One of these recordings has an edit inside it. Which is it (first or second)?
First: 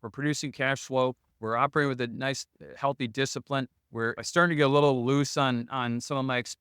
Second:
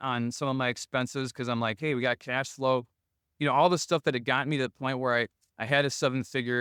first